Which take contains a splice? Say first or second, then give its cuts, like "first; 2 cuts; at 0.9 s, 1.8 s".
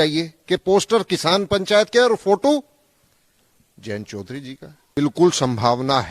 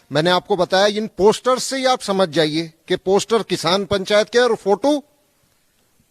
first; 1 cut; at 4.9 s